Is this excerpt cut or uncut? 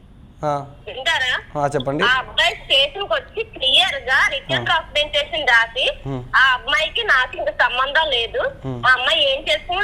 uncut